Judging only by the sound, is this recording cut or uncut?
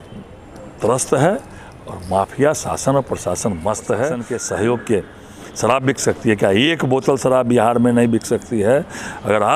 cut